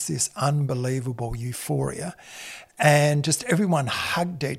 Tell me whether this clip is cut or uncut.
uncut